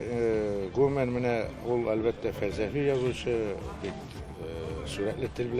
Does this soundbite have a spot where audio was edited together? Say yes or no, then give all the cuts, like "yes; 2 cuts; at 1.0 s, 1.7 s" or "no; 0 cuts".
no; 0 cuts